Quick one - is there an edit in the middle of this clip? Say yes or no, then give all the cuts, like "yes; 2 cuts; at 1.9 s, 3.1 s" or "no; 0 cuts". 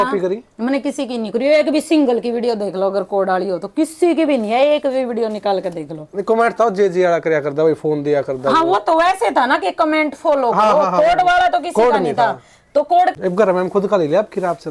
yes; 1 cut; at 13.1 s